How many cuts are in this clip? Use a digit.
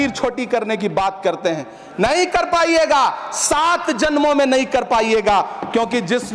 0